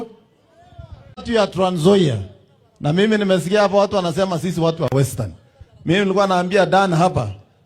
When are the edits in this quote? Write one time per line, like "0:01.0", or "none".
0:01.2